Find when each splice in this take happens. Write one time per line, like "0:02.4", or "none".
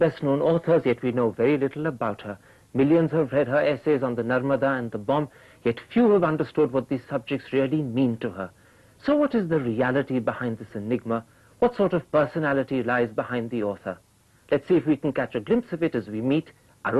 0:11.4